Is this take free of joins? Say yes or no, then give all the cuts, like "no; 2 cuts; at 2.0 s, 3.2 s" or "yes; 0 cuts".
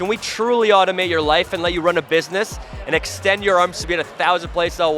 yes; 0 cuts